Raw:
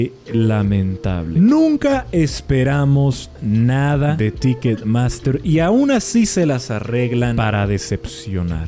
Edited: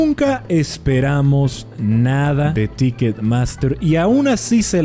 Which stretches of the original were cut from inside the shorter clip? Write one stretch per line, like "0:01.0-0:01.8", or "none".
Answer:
none